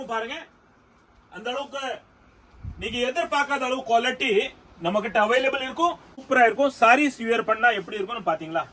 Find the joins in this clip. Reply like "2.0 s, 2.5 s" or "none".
6.1 s